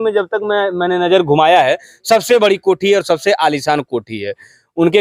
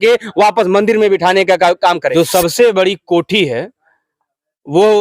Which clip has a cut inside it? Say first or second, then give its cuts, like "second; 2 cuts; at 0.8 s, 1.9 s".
second; 1 cut; at 2.1 s